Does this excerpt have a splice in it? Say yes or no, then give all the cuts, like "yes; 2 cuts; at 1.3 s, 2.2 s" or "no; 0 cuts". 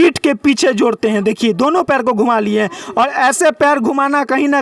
no; 0 cuts